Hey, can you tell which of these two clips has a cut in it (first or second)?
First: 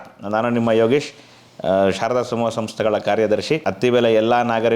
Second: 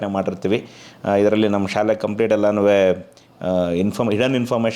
first